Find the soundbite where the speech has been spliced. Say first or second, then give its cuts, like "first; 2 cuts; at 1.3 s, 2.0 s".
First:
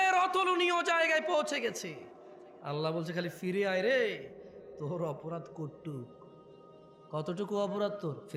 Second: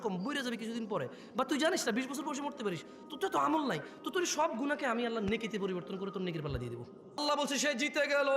second; 1 cut; at 7.2 s